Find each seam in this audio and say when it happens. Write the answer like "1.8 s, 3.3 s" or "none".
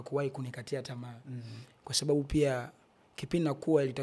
none